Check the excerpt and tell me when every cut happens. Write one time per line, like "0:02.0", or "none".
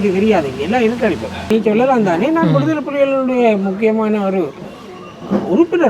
0:01.5